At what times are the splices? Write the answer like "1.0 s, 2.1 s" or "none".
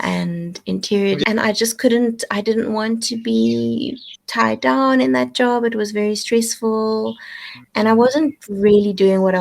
1.2 s